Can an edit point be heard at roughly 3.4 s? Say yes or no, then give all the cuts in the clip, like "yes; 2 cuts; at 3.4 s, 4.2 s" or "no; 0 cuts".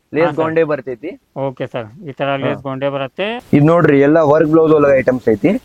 yes; 1 cut; at 3.4 s